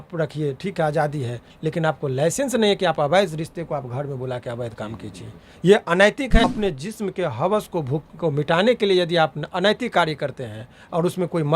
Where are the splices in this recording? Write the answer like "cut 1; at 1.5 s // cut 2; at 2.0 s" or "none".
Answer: cut 1; at 6.4 s